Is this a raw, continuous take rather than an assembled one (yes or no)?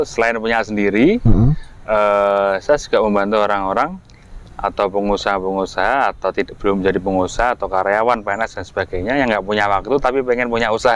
yes